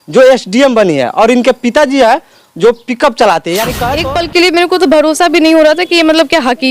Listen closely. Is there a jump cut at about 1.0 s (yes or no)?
no